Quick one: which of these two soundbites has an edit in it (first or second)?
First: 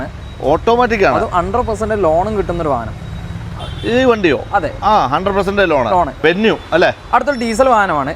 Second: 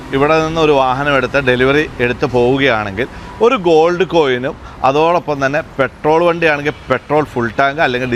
first